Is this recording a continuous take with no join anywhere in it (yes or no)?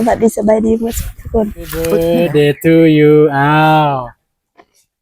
no